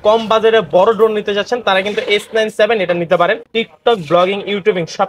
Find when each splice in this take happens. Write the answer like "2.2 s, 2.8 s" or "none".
3.4 s